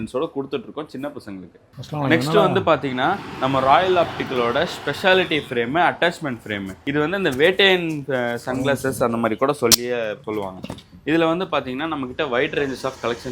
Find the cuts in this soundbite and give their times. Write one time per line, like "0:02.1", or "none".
none